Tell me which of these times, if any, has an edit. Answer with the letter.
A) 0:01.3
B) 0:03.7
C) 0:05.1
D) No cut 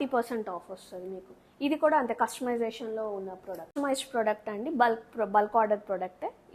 B